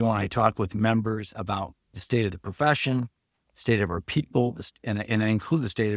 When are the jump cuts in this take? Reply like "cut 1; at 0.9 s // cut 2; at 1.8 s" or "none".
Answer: none